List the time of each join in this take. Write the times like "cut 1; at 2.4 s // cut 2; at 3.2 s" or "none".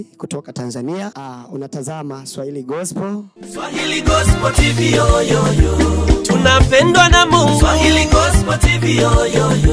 cut 1; at 1.2 s // cut 2; at 3.3 s